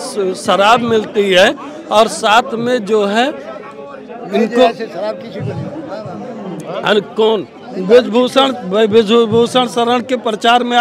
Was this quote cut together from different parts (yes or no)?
no